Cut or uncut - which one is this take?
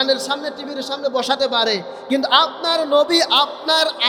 uncut